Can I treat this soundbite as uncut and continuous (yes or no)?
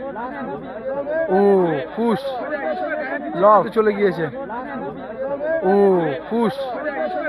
no